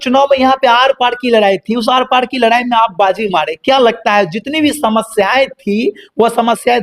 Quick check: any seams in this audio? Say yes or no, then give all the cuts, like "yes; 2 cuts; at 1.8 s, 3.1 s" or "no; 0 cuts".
no; 0 cuts